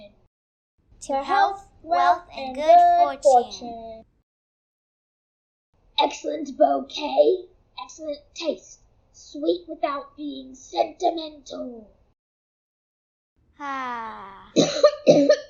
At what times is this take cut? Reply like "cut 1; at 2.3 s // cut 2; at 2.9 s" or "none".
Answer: none